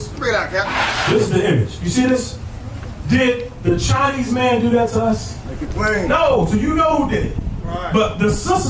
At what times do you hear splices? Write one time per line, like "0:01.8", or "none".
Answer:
none